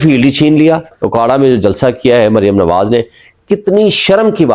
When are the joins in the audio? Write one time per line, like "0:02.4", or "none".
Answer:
0:01.0